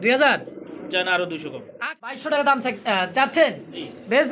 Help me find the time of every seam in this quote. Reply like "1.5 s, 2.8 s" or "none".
1.7 s

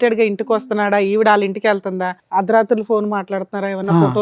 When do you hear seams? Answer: 2.1 s

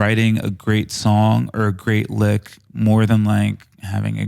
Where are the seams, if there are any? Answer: none

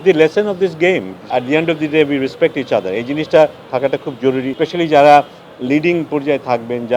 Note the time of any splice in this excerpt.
1.2 s, 4.5 s

